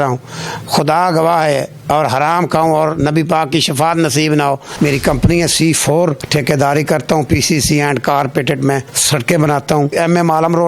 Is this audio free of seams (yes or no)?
no